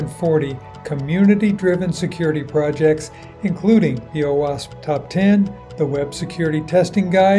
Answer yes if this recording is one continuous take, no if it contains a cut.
yes